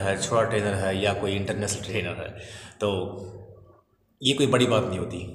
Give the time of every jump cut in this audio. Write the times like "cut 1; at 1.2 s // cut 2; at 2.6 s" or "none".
cut 1; at 1.8 s